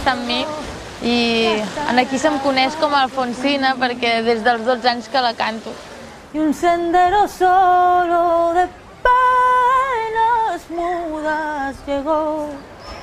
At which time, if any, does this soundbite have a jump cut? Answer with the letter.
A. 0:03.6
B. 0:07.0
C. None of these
B